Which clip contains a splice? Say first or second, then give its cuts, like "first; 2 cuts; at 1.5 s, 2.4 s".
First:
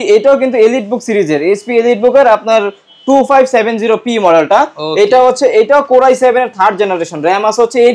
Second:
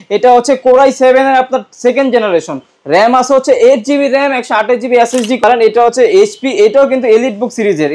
second; 1 cut; at 5.4 s